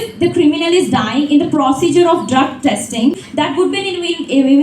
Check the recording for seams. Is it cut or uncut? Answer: cut